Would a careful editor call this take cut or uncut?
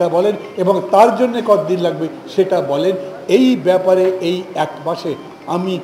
uncut